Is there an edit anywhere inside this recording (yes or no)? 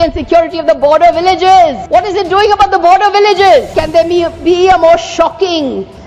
yes